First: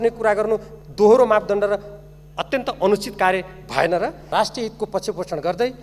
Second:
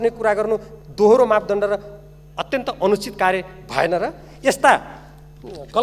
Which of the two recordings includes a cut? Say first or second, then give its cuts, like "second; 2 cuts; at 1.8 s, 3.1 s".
first; 1 cut; at 4.3 s